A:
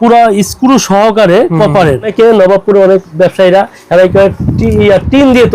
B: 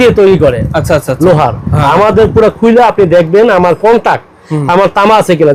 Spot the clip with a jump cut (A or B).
A